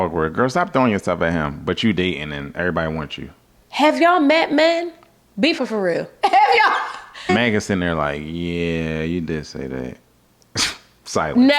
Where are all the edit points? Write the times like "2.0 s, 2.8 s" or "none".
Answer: 5.6 s, 7.3 s